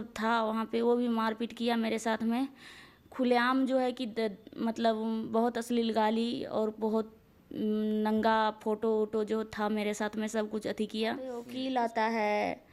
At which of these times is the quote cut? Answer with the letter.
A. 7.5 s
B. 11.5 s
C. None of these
B